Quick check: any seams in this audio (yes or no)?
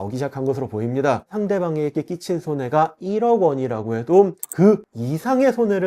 yes